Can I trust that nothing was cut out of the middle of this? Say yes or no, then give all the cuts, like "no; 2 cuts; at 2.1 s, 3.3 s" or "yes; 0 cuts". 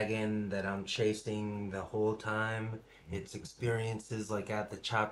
yes; 0 cuts